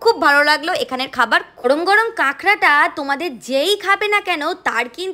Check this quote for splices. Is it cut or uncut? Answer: cut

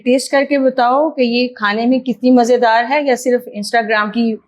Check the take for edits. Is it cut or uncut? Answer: uncut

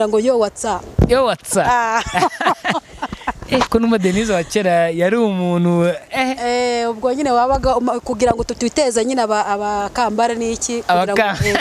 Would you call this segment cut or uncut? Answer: uncut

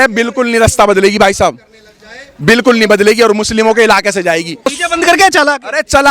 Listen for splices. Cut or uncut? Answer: cut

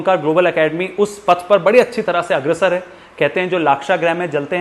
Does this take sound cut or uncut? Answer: uncut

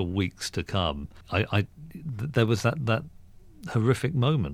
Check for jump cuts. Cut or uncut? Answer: cut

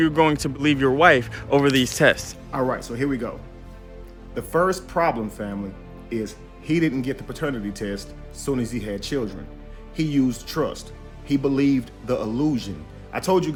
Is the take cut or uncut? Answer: uncut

